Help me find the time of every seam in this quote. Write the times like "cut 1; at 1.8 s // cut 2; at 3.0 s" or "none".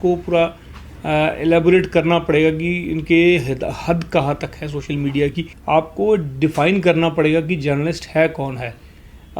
cut 1; at 5.5 s